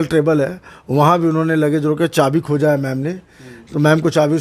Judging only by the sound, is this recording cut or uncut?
uncut